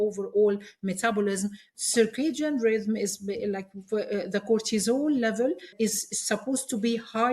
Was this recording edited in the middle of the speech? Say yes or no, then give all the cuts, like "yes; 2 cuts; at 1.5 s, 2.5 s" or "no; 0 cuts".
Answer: yes; 2 cuts; at 1.7 s, 5.7 s